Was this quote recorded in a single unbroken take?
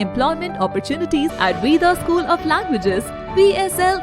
no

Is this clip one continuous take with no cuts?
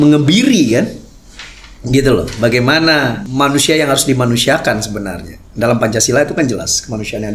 no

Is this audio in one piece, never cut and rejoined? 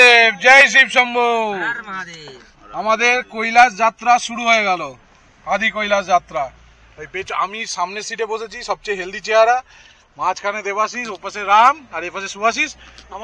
yes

